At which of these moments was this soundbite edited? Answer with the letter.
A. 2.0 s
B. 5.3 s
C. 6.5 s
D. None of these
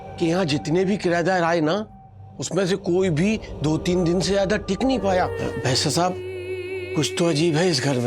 B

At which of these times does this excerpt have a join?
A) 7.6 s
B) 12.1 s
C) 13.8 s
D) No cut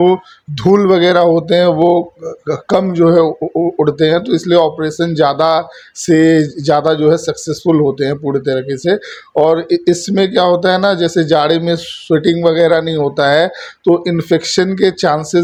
D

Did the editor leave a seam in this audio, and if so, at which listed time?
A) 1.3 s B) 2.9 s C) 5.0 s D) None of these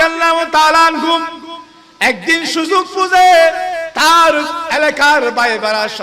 D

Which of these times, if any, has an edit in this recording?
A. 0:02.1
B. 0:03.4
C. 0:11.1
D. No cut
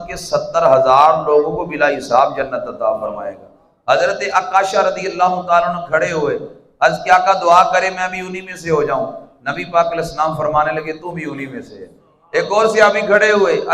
D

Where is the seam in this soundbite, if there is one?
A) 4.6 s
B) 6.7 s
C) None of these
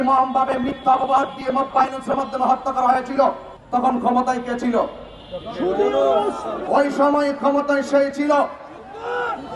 B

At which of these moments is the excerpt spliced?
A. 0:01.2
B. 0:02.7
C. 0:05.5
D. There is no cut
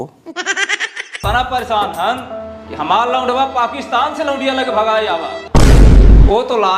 A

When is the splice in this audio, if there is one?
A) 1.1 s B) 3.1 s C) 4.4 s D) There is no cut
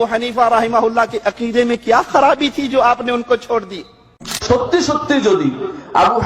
C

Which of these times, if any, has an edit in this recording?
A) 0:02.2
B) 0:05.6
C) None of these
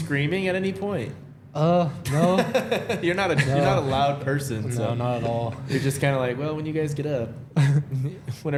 C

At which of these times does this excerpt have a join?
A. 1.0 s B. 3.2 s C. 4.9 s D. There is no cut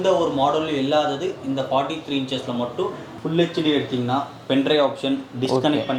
B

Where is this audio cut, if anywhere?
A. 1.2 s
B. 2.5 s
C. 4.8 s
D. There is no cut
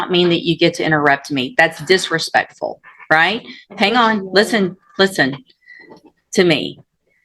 D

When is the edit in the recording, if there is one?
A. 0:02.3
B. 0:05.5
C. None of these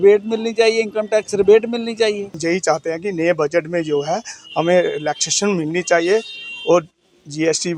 A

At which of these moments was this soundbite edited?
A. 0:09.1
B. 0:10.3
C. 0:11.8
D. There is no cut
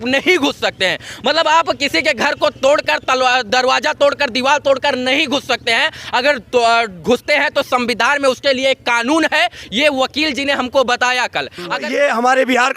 C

